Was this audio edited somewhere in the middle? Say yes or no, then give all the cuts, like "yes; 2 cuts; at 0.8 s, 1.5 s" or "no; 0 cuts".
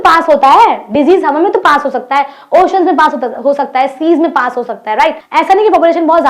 yes; 1 cut; at 5.2 s